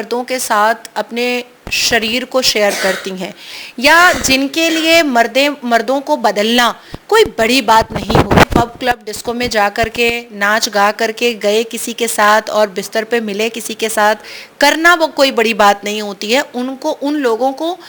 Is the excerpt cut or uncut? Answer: uncut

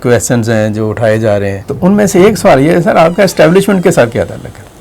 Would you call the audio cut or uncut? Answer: cut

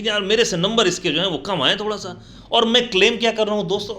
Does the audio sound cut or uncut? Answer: uncut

